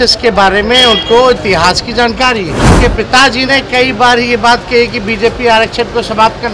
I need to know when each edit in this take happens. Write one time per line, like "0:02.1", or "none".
0:02.7